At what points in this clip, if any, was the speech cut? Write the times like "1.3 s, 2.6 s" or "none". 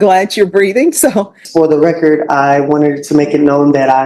1.4 s